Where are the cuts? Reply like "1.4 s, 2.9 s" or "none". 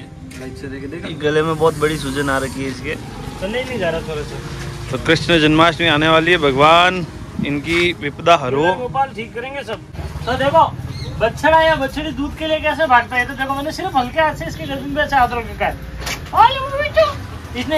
9.9 s